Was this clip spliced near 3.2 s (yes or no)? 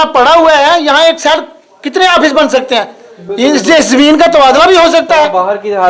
no